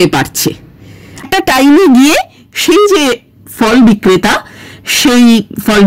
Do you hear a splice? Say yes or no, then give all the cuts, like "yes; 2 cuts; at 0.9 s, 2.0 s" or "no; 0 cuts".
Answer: yes; 1 cut; at 1.4 s